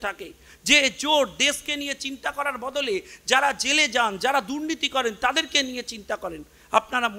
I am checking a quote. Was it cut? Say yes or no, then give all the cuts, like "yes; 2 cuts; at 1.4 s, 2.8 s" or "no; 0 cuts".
no; 0 cuts